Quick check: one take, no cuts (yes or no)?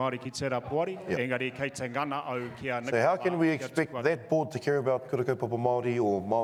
yes